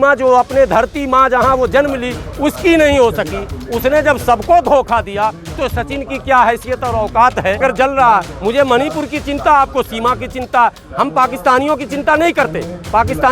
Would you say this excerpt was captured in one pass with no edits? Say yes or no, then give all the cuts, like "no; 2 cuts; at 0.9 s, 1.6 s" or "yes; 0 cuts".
no; 1 cut; at 7.6 s